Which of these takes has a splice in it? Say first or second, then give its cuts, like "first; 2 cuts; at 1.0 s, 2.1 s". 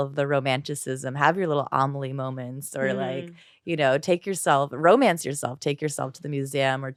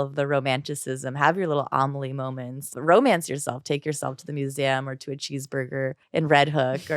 second; 2 cuts; at 2.7 s, 6.0 s